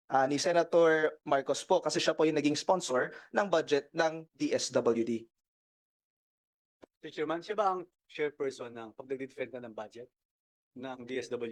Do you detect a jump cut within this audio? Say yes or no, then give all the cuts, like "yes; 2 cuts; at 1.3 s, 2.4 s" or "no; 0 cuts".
no; 0 cuts